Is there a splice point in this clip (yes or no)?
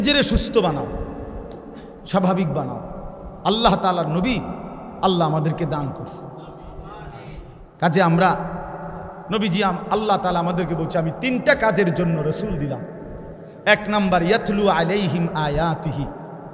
no